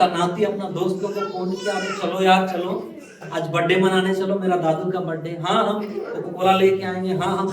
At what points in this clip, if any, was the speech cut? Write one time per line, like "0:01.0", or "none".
none

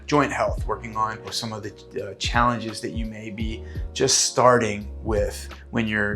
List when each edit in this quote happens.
0:01.3

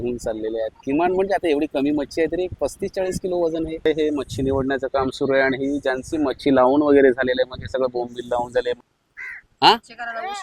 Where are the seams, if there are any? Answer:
0:03.8
0:08.8

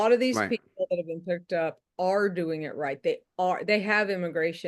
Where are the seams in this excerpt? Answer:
none

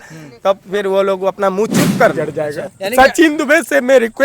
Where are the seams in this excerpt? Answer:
0:02.2

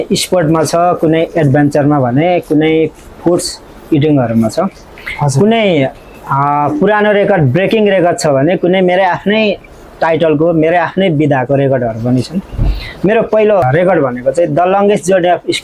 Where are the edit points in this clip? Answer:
0:13.6

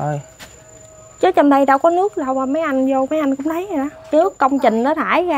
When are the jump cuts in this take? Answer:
0:04.1

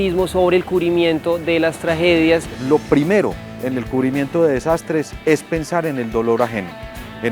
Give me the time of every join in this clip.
0:02.5

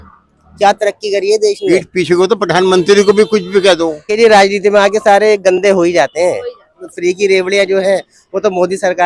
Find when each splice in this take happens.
0:01.7
0:04.1
0:06.9

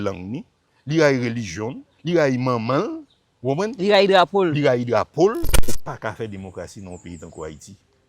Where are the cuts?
0:05.6

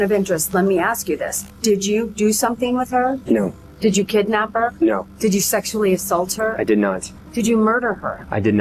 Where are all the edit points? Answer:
0:07.2

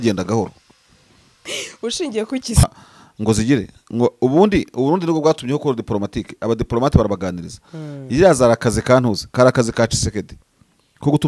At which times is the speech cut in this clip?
0:02.6

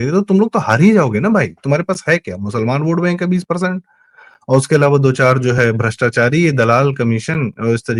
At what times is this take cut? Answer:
none

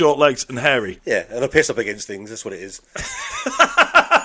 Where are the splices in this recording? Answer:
0:00.9

